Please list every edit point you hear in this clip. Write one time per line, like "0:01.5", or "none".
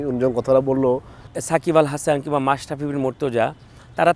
0:01.3